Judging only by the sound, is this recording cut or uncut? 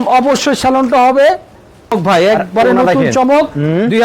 cut